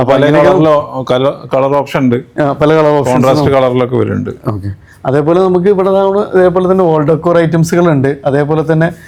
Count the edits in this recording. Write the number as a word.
zero